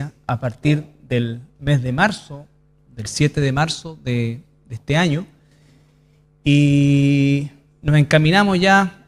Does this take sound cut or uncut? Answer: uncut